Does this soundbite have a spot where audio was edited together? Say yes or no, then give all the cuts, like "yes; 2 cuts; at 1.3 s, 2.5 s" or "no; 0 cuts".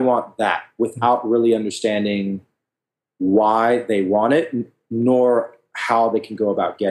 no; 0 cuts